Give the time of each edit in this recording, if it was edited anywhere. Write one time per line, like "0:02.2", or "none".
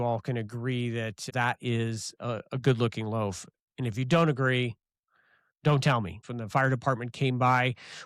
0:01.3
0:06.3